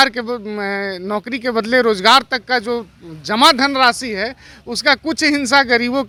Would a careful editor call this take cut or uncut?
uncut